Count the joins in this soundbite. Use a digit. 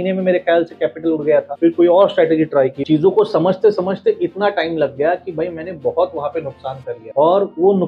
3